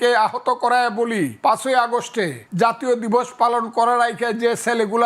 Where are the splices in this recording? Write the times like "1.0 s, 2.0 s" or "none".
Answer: 1.3 s, 2.4 s

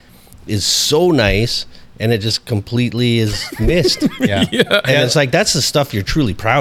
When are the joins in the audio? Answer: none

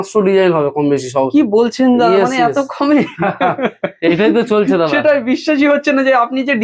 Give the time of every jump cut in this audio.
none

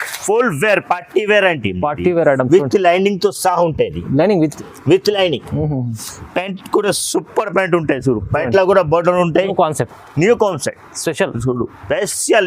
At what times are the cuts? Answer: 9.5 s

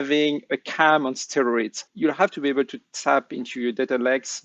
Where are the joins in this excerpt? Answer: 1.8 s

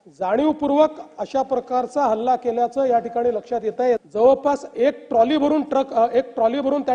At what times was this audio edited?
4.0 s

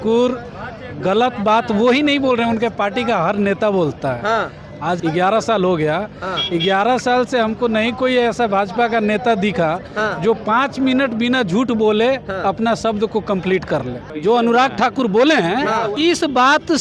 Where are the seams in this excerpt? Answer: 5.0 s, 14.0 s, 16.0 s

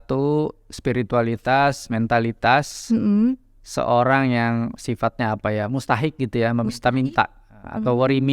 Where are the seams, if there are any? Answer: none

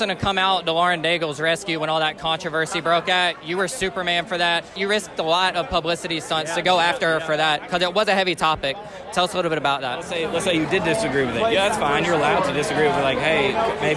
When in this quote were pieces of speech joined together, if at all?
4.8 s, 10.2 s

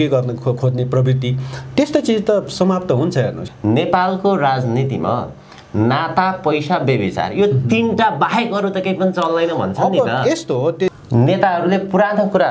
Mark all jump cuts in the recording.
3.4 s, 11.0 s

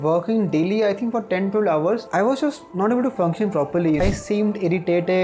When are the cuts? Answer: 2.0 s, 4.0 s

